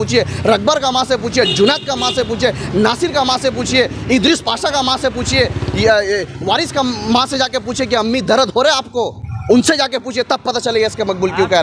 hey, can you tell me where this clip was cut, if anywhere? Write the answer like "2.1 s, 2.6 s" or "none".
none